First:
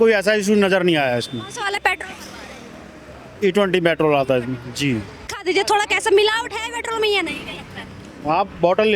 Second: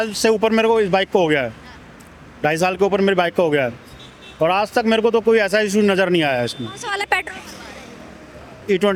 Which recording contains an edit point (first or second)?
first